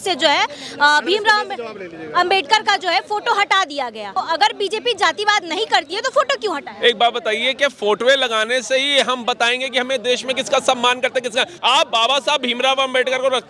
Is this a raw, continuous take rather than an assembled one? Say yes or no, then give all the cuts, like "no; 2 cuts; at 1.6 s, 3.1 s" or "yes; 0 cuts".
no; 2 cuts; at 4.1 s, 11.5 s